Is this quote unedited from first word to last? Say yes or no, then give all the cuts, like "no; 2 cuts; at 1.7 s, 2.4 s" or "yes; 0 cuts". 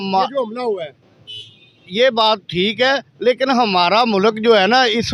yes; 0 cuts